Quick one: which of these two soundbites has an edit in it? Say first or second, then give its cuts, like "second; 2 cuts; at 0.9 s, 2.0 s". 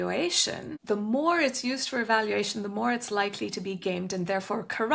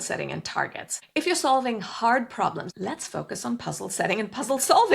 second; 2 cuts; at 0.9 s, 2.7 s